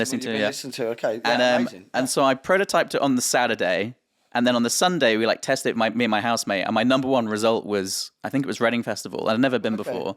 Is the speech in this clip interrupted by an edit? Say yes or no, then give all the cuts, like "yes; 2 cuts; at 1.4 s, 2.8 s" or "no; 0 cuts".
no; 0 cuts